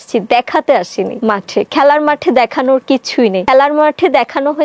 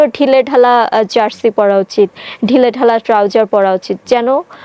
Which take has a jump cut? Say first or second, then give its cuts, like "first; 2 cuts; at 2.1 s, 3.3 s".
first; 2 cuts; at 1.1 s, 3.4 s